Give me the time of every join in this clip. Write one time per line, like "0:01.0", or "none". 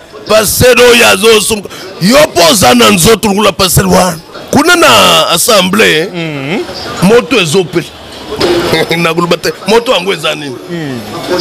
0:04.3